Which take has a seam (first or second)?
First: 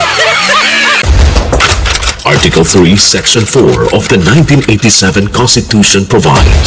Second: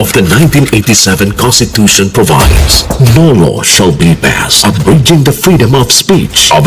first